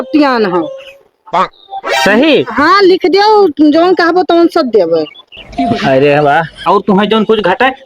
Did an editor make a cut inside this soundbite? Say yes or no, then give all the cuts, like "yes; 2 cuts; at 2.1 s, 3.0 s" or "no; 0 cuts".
yes; 1 cut; at 6.7 s